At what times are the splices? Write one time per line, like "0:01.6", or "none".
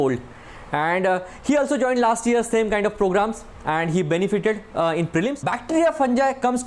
0:05.5